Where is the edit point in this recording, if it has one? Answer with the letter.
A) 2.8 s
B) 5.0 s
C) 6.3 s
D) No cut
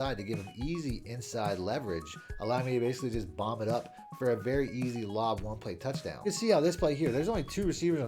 C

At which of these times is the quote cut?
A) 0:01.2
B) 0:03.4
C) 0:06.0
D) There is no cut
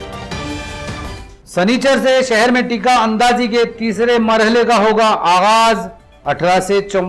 A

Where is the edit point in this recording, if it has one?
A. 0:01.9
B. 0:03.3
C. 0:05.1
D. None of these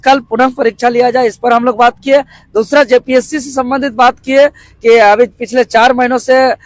D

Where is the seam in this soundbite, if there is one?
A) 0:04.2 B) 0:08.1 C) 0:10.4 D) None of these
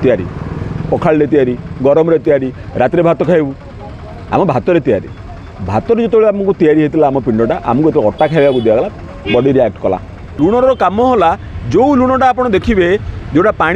C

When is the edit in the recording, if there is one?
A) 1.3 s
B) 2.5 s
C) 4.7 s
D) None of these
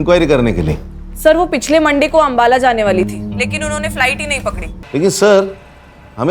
C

